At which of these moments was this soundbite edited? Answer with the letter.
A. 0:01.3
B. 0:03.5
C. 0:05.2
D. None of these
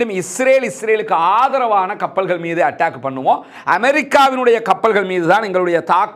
D